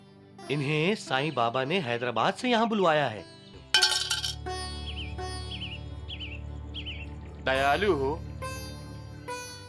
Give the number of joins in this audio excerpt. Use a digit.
1